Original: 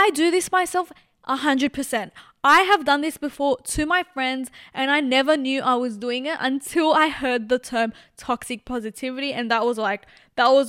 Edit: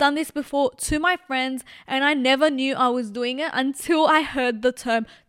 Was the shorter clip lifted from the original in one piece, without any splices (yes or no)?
yes